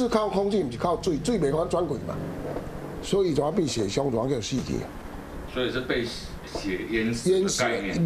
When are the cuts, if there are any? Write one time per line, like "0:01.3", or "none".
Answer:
none